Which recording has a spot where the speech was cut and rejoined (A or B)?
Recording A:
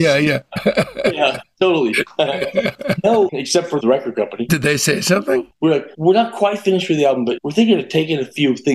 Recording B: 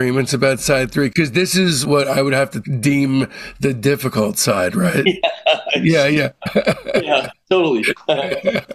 A